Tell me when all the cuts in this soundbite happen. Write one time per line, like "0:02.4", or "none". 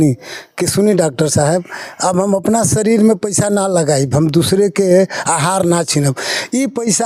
none